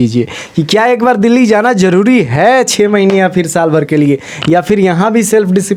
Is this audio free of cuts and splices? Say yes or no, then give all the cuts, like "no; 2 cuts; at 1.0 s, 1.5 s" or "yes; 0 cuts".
yes; 0 cuts